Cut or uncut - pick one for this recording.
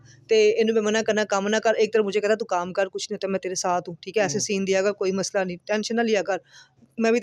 uncut